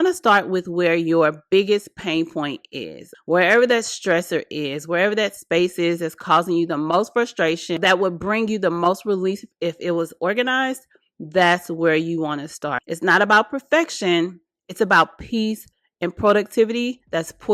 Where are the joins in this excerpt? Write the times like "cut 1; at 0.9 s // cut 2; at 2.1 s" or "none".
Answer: cut 1; at 3.1 s // cut 2; at 7.8 s // cut 3; at 12.8 s